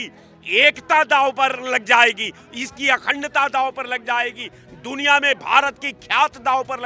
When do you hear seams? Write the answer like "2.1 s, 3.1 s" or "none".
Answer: none